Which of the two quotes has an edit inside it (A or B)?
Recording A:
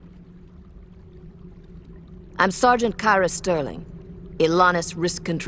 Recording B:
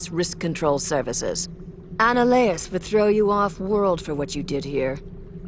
B